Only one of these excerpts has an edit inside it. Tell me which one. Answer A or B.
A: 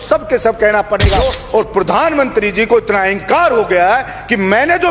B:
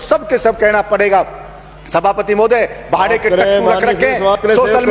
A